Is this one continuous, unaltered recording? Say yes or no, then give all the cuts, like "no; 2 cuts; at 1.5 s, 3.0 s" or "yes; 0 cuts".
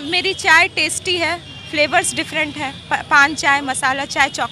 yes; 0 cuts